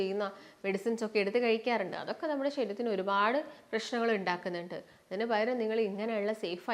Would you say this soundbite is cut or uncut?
uncut